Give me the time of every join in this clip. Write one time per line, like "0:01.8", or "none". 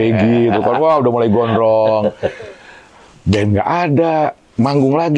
none